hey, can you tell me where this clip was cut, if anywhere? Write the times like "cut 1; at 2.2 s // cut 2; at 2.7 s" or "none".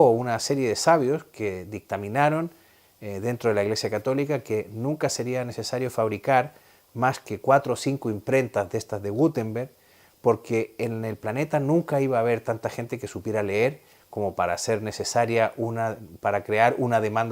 cut 1; at 3.4 s